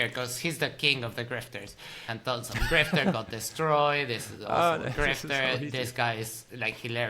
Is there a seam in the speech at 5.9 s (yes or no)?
no